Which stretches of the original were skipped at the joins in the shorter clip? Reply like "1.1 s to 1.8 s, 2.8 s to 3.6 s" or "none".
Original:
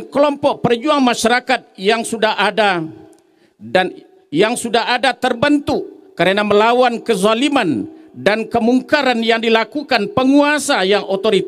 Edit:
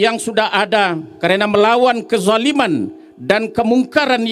2.9 s to 6.0 s